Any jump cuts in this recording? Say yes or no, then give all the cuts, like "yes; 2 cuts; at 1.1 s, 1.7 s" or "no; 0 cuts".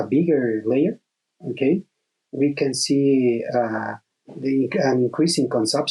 no; 0 cuts